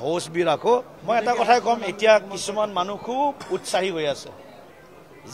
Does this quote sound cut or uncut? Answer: cut